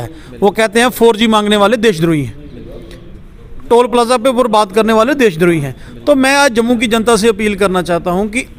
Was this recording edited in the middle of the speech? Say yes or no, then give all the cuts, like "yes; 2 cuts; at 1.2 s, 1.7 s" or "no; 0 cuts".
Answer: no; 0 cuts